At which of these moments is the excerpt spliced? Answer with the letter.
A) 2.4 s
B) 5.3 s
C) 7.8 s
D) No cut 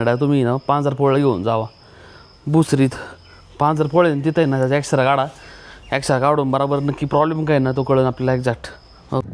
D